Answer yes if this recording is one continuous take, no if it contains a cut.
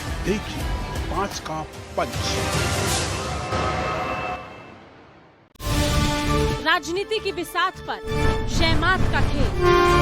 no